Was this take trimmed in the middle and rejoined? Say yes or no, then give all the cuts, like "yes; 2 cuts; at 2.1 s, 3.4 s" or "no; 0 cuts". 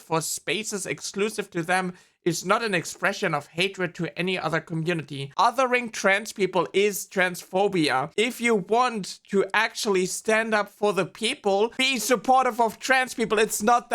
yes; 2 cuts; at 5.3 s, 8.1 s